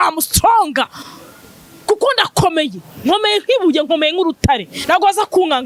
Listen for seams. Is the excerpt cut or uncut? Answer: uncut